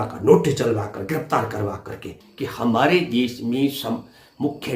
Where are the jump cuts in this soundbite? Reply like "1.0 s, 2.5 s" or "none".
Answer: 2.2 s